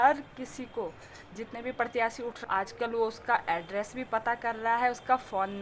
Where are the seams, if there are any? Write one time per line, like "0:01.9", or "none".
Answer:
0:02.4